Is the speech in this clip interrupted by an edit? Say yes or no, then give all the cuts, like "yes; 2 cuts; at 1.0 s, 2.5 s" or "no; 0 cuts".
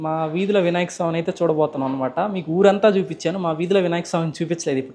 no; 0 cuts